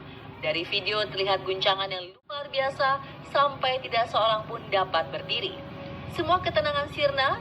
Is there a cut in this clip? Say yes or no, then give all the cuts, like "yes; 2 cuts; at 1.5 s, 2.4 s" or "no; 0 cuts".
yes; 1 cut; at 2.0 s